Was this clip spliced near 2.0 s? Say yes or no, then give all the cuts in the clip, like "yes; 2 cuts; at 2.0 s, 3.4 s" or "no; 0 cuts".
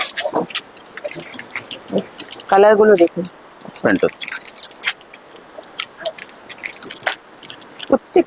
no; 0 cuts